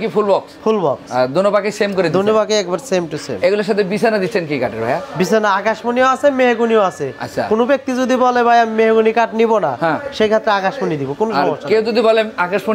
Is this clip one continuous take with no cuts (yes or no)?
yes